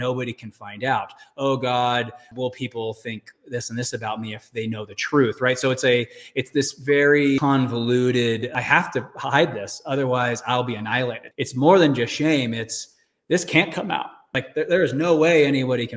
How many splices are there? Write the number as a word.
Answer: five